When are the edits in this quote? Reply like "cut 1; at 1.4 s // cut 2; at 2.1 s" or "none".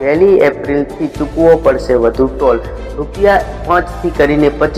none